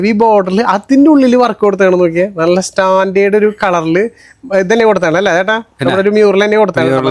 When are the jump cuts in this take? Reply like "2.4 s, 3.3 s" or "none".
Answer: none